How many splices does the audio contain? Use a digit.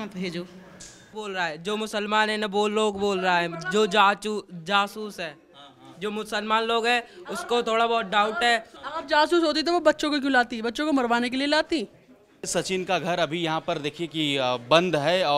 3